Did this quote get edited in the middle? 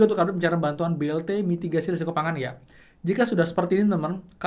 no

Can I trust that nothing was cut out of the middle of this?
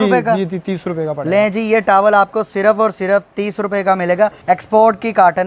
no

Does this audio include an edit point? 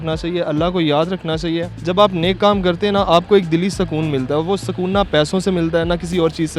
yes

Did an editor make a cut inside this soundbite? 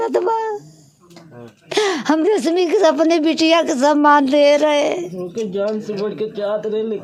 no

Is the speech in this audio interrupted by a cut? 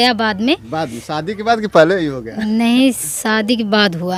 no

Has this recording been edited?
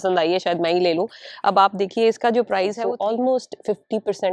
yes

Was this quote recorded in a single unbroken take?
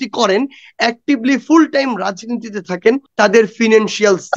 no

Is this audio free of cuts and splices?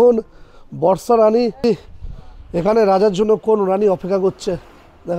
no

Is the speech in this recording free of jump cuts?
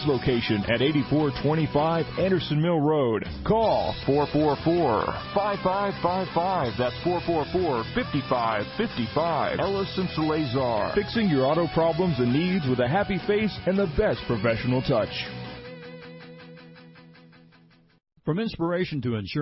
yes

